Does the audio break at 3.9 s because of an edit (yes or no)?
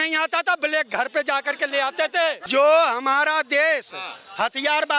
no